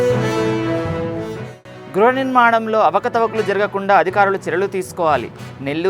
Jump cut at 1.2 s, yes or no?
yes